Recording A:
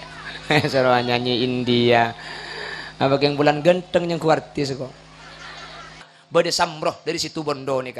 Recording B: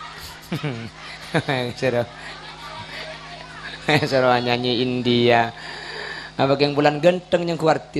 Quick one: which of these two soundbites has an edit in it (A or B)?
A